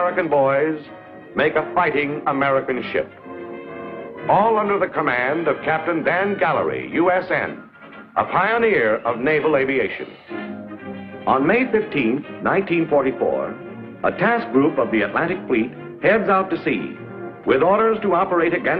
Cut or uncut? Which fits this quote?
cut